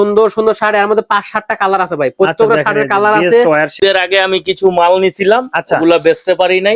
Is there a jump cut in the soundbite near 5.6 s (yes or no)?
no